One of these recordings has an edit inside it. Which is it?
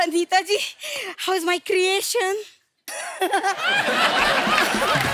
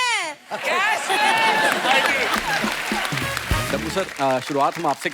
second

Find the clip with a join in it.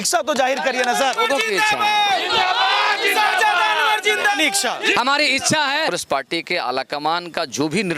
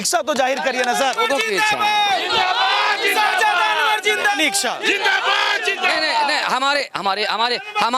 first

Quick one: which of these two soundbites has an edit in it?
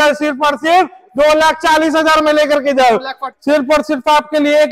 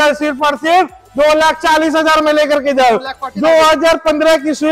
first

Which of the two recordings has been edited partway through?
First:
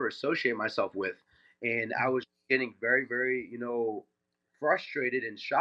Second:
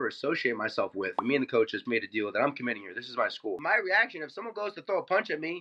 second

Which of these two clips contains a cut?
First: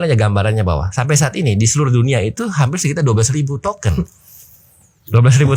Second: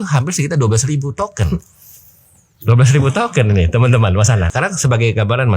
second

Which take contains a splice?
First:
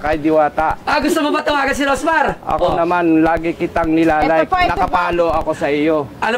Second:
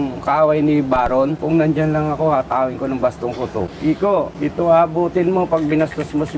second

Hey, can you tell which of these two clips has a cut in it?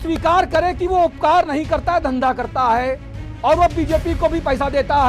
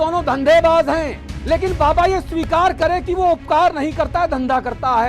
second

